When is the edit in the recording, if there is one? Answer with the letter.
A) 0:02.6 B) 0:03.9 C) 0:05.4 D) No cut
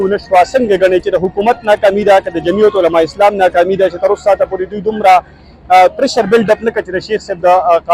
D